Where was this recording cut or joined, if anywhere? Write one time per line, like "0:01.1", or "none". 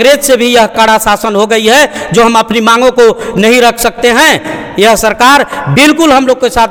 none